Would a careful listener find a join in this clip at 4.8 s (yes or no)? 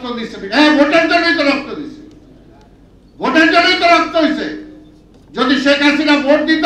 no